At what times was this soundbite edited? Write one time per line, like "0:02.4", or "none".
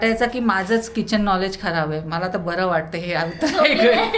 none